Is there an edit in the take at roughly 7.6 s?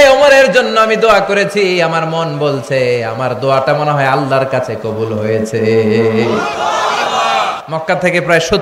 yes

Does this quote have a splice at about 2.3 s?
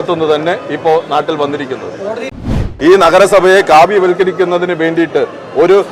yes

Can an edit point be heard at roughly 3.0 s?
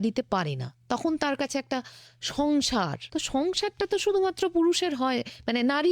yes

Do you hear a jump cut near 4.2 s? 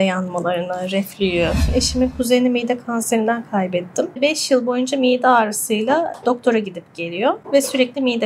yes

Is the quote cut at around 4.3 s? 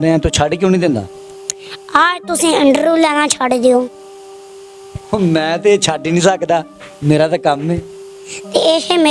no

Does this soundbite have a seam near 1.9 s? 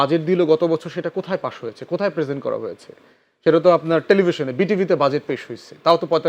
no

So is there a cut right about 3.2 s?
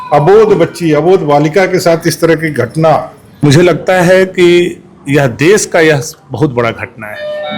yes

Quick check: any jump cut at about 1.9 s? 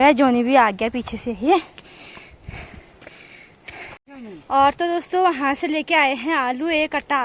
no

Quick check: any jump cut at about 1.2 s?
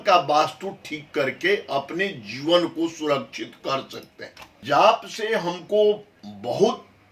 no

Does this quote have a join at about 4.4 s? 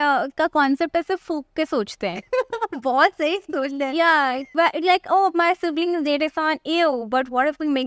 yes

